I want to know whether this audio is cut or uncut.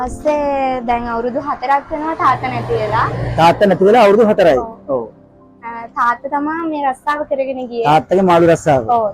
uncut